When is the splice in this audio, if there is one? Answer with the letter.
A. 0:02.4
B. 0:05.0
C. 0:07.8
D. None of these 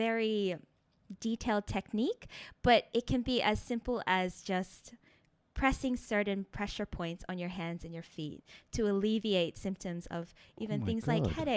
D